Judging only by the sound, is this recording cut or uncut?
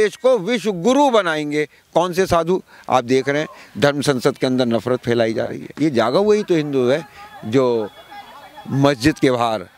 cut